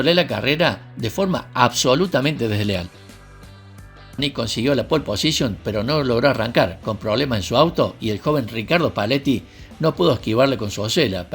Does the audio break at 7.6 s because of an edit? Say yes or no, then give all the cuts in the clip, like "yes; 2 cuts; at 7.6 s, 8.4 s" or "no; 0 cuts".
no; 1 cut; at 4.2 s